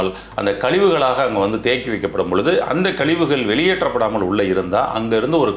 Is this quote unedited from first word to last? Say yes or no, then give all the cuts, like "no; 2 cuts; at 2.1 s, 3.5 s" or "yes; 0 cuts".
yes; 0 cuts